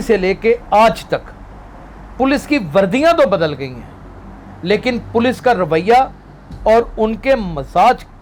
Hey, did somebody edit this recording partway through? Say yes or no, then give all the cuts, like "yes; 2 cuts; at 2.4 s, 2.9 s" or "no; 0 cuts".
no; 0 cuts